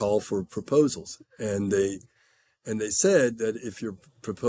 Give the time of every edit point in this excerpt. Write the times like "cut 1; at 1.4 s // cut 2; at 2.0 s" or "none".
none